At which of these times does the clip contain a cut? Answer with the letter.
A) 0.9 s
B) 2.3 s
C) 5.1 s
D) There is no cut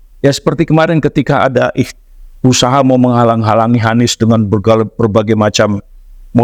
D